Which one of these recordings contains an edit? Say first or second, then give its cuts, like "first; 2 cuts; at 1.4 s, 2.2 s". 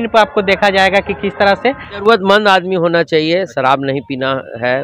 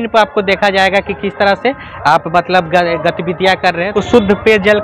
first; 1 cut; at 2.0 s